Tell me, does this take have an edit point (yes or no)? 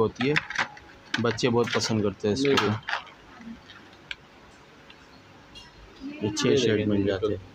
no